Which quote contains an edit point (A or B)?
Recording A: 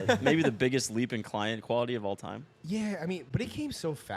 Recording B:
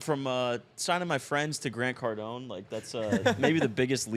A